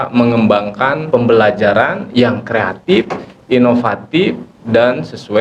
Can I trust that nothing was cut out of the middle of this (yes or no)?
no